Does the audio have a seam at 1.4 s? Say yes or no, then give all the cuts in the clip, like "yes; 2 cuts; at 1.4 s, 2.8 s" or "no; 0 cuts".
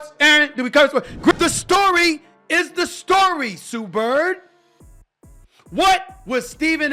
yes; 1 cut; at 1.4 s